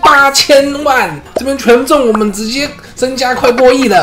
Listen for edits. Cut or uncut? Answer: uncut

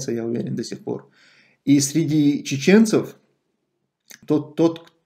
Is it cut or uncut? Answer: cut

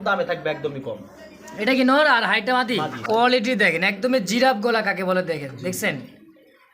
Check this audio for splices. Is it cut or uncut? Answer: cut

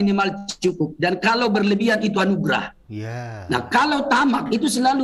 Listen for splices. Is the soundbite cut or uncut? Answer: uncut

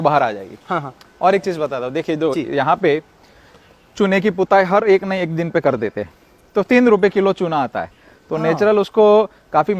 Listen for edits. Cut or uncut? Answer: uncut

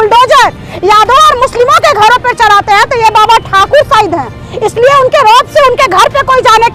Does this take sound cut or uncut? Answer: uncut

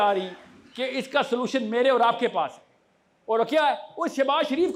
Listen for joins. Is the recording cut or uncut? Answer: uncut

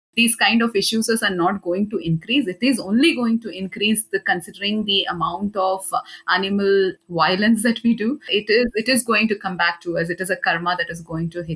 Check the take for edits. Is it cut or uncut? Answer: cut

